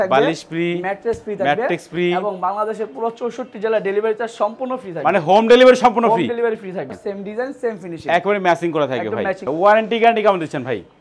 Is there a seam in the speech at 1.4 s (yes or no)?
no